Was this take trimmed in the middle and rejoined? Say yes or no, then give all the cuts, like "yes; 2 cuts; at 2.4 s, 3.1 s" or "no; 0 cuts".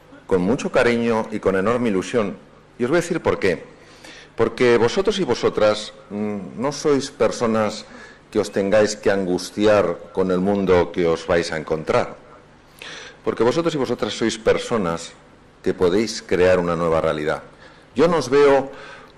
yes; 1 cut; at 6.9 s